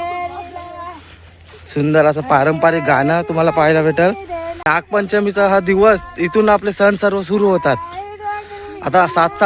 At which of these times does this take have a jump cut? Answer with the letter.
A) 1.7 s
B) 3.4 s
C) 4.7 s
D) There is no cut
C